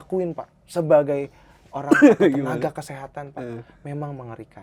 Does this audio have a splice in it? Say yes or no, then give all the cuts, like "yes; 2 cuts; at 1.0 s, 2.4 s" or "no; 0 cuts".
no; 0 cuts